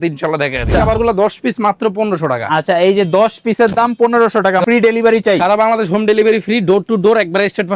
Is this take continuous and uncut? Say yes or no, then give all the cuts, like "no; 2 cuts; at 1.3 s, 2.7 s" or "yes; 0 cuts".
no; 2 cuts; at 0.7 s, 4.6 s